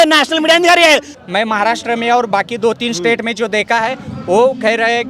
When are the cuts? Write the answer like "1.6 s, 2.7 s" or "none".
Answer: 1.2 s